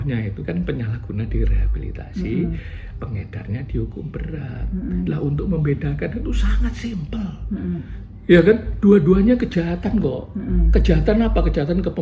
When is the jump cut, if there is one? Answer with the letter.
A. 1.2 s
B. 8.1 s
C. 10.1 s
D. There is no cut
D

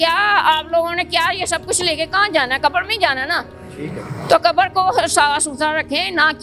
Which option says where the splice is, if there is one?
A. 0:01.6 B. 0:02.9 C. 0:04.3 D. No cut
D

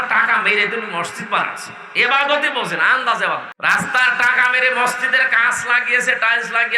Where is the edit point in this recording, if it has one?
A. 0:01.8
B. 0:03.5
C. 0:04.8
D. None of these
B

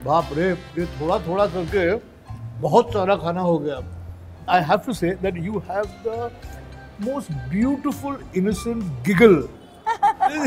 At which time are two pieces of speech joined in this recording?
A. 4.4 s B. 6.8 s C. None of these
A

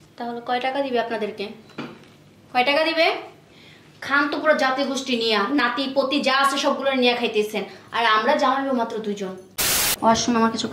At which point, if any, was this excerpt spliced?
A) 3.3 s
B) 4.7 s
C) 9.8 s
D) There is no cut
C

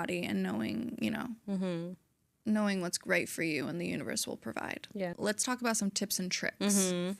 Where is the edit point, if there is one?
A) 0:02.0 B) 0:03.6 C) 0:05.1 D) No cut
C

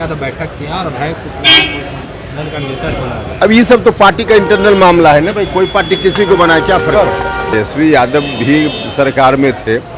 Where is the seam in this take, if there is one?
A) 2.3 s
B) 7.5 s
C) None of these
B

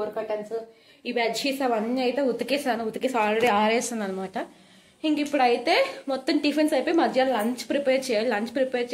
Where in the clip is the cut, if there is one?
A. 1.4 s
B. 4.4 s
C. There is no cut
C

